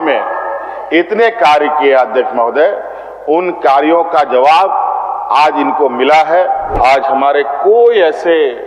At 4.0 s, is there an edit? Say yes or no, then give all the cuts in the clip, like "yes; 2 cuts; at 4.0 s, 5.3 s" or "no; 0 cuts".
no; 1 cut; at 6.8 s